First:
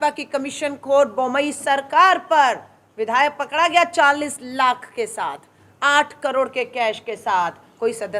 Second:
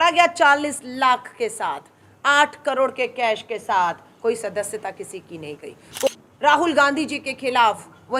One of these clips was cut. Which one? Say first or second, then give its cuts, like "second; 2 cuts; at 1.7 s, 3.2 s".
second; 1 cut; at 6.1 s